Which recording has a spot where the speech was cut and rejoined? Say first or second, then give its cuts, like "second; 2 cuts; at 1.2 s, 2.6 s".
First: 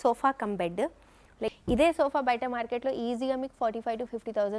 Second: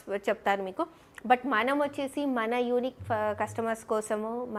first; 1 cut; at 1.5 s